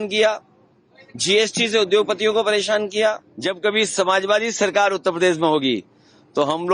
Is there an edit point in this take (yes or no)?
yes